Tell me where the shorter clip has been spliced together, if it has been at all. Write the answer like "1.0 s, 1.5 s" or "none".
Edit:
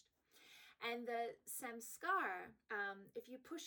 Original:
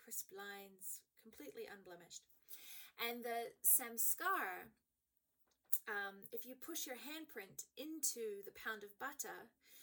2.6 s